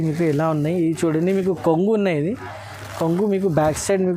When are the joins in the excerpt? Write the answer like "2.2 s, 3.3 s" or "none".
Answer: none